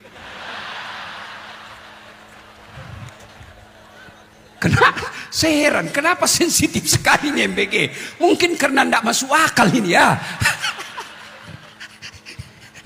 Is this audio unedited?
yes; 0 cuts

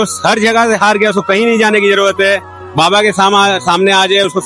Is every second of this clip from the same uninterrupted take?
yes; 0 cuts

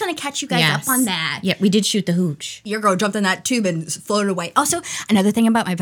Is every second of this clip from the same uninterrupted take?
no; 1 cut; at 2.7 s

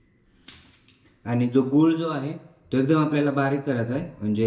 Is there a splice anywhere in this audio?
no; 0 cuts

